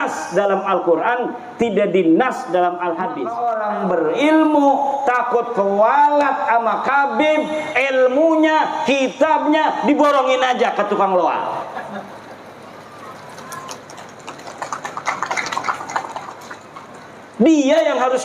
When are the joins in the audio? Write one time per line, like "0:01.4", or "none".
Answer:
0:03.3